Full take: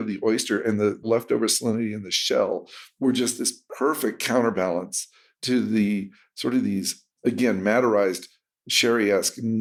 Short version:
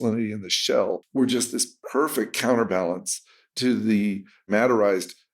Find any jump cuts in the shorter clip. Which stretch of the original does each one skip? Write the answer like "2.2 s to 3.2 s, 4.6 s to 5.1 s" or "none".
2.7 s to 2.9 s, 6.3 s to 7.6 s